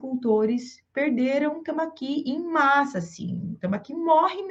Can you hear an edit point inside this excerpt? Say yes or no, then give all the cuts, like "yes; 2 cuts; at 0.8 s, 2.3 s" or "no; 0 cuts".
no; 0 cuts